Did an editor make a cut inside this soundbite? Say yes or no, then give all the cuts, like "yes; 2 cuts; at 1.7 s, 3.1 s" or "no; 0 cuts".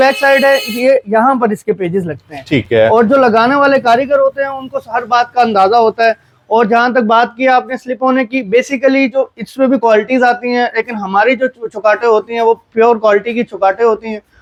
no; 0 cuts